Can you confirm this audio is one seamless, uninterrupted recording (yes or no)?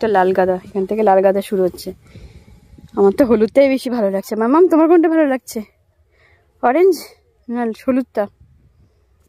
yes